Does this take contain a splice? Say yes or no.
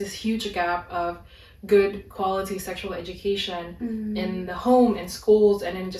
no